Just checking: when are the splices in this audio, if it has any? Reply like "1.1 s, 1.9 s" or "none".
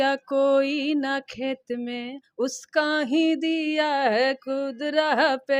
none